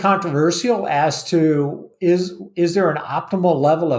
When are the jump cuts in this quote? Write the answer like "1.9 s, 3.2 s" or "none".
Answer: none